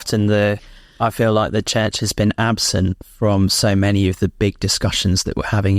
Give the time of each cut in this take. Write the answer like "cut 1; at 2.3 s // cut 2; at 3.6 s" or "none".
none